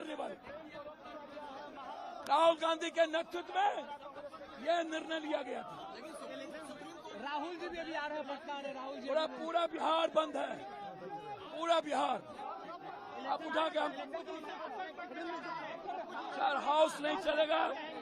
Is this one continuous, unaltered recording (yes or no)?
yes